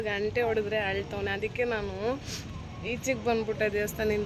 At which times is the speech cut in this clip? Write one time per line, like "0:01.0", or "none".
none